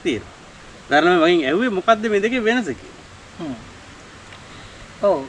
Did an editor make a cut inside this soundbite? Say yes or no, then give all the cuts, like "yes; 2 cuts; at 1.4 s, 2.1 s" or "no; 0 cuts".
no; 0 cuts